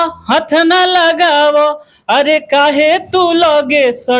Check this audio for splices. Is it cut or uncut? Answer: uncut